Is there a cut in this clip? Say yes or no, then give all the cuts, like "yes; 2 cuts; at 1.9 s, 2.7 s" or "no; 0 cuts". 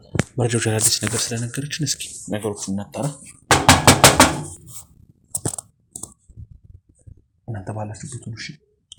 no; 0 cuts